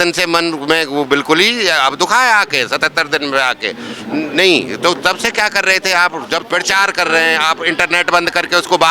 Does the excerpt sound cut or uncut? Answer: cut